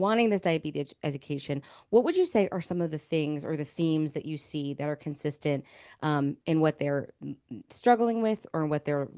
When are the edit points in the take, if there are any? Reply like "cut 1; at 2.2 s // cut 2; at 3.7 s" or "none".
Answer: none